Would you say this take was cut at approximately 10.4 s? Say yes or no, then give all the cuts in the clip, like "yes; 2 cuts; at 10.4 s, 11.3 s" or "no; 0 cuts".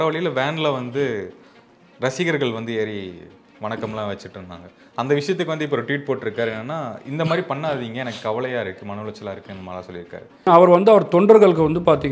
yes; 1 cut; at 10.4 s